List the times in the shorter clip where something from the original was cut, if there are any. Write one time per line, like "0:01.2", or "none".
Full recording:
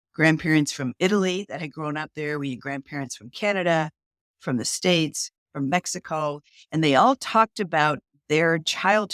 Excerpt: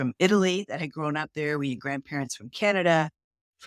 none